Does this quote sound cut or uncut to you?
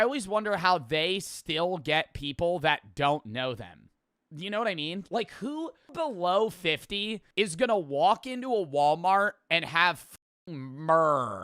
cut